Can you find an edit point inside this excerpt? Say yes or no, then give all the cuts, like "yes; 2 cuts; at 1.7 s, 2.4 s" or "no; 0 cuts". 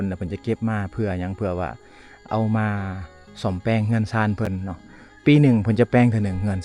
no; 0 cuts